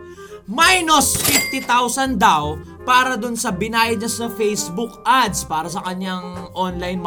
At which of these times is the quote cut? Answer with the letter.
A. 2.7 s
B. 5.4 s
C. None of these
C